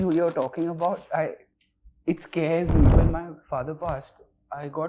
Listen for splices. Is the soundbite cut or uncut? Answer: cut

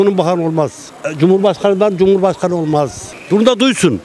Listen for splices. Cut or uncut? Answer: cut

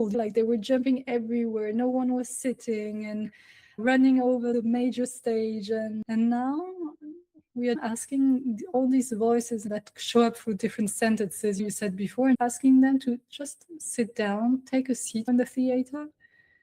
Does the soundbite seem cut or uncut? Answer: cut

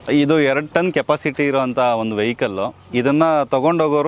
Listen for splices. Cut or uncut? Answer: uncut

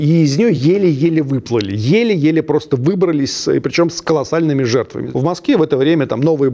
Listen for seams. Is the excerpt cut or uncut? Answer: cut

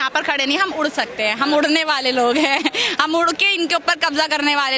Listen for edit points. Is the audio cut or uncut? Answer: uncut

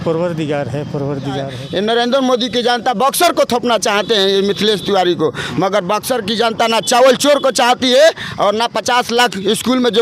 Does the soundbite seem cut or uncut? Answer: cut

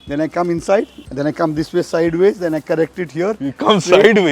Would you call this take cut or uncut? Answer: cut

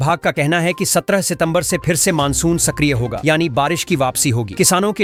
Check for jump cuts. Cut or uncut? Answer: uncut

